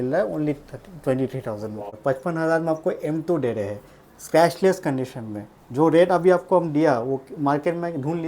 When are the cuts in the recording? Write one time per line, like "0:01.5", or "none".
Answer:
0:01.9